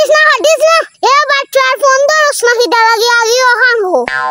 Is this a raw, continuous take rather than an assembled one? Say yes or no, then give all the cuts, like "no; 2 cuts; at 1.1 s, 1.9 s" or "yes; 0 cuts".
no; 1 cut; at 0.9 s